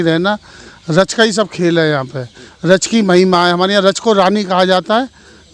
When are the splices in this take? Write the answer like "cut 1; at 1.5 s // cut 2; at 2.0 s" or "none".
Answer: none